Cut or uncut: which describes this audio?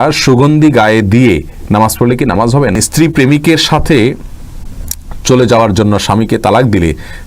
cut